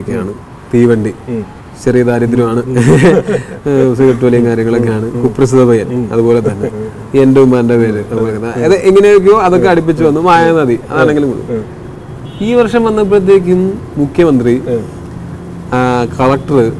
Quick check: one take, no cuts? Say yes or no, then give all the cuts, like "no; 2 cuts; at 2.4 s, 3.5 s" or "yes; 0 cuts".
yes; 0 cuts